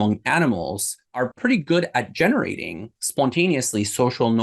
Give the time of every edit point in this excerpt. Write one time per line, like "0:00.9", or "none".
0:01.1